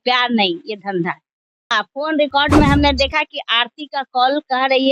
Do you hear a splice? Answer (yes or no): yes